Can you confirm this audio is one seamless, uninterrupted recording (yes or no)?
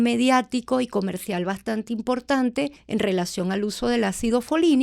no